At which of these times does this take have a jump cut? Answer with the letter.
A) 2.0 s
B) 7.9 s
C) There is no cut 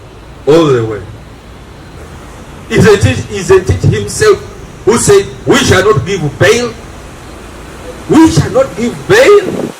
A